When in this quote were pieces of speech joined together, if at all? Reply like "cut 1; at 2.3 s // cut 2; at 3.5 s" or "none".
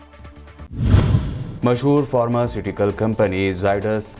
cut 1; at 1.0 s